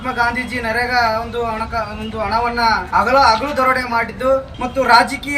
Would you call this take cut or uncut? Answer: cut